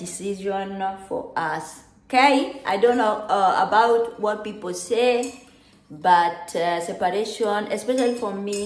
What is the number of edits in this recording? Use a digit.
0